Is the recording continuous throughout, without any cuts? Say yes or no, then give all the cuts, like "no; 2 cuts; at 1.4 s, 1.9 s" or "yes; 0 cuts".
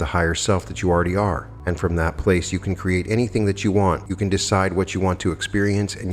no; 2 cuts; at 1.5 s, 4.1 s